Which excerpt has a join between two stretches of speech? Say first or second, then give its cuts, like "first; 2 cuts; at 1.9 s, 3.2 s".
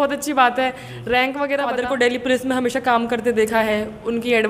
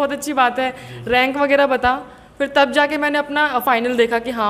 first; 1 cut; at 1.7 s